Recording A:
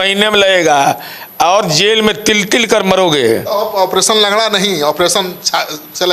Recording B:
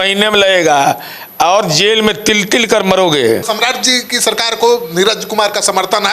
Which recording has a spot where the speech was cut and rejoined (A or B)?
B